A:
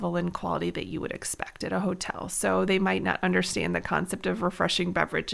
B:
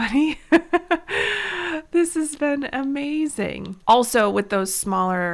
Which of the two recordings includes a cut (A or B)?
B